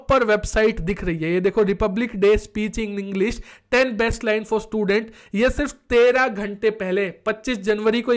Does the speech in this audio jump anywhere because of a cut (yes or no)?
no